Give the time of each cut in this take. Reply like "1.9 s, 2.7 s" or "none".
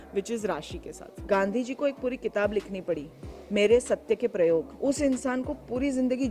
1.2 s